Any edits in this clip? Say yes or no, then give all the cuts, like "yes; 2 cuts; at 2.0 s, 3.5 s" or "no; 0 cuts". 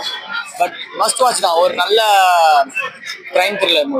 no; 0 cuts